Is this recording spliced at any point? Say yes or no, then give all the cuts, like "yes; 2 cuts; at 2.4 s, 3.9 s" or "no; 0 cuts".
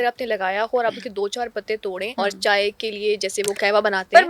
yes; 1 cut; at 2.1 s